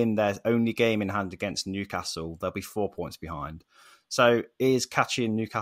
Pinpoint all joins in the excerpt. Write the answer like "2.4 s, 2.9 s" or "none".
none